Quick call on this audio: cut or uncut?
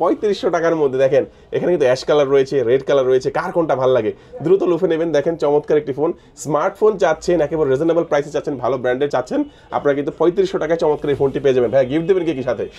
uncut